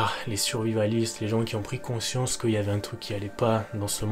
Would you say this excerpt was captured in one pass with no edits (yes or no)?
yes